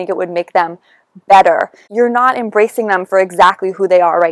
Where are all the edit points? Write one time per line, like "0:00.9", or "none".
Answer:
0:01.9